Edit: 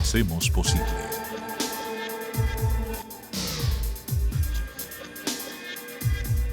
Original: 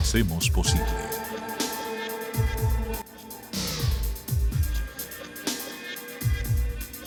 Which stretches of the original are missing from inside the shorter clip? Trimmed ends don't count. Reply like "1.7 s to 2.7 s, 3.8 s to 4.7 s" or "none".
3.1 s to 3.3 s